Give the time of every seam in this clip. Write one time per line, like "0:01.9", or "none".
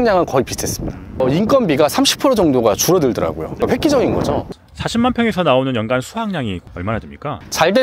0:01.2
0:03.6
0:04.5